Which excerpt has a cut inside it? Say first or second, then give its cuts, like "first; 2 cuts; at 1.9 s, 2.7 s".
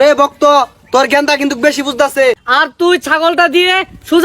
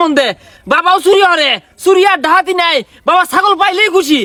first; 1 cut; at 2.4 s